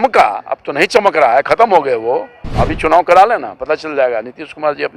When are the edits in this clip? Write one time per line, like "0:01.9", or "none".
0:02.4